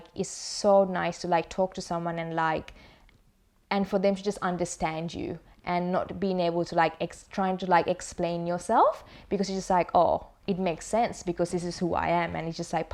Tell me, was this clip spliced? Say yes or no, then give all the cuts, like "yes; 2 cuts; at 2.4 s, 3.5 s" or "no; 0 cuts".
no; 0 cuts